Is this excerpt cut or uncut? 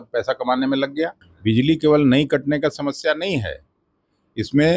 cut